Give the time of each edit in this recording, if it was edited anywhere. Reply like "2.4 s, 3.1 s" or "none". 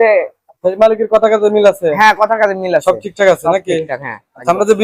none